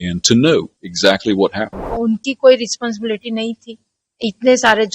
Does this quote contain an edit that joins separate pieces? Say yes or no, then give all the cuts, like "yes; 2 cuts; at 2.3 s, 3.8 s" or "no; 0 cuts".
yes; 1 cut; at 1.9 s